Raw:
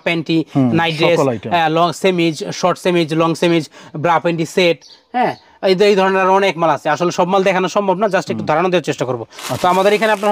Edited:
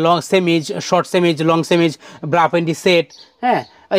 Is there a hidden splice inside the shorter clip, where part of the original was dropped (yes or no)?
no